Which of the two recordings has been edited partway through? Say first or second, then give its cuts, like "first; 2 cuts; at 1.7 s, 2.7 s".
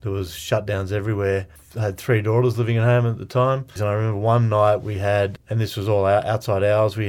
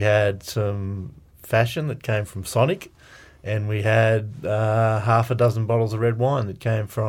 first; 3 cuts; at 1.6 s, 3.7 s, 5.4 s